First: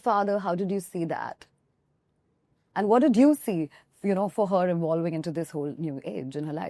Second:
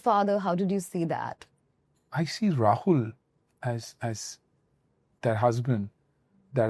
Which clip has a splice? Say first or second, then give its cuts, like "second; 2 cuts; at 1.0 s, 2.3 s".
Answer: second; 1 cut; at 2.0 s